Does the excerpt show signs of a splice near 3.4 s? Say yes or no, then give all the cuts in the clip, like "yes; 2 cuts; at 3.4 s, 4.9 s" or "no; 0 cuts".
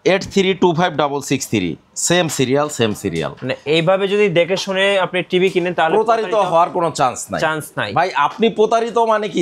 no; 0 cuts